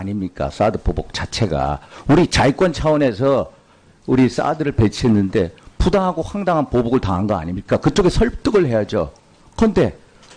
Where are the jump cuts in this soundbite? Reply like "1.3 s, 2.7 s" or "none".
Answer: 1.5 s